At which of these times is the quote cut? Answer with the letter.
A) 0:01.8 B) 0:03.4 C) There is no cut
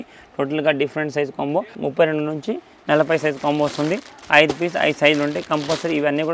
C